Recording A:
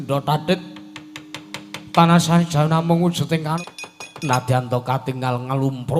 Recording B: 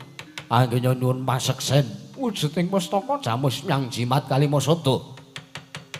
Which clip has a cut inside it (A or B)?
A